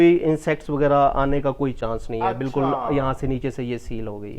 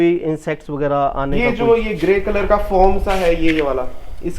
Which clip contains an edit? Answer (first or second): second